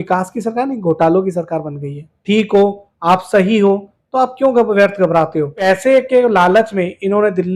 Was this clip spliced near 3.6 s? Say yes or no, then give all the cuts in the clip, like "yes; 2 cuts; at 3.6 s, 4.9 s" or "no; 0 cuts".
no; 2 cuts; at 2.1 s, 5.6 s